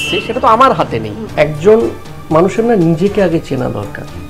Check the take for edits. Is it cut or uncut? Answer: cut